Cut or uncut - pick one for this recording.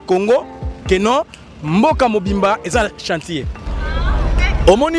cut